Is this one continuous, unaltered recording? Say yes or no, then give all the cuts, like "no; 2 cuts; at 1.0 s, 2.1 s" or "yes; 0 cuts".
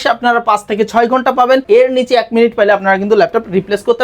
no; 1 cut; at 1.6 s